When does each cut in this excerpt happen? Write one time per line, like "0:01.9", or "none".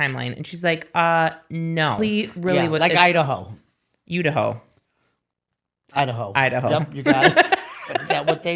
0:02.0

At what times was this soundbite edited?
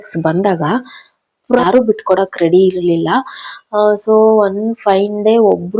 0:01.6

